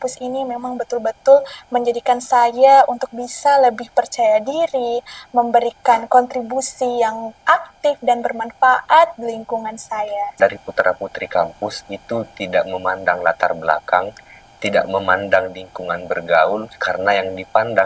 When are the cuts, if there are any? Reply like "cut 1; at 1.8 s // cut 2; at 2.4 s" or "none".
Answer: cut 1; at 10.4 s

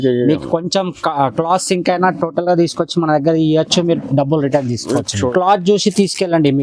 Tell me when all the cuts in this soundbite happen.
cut 1; at 5.3 s

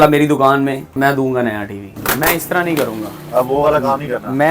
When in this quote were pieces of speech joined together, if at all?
cut 1; at 0.9 s // cut 2; at 1.9 s

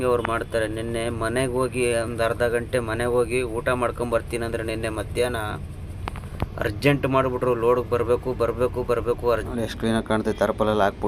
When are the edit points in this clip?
cut 1; at 9.5 s

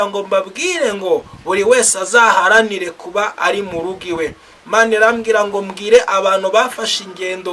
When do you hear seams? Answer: none

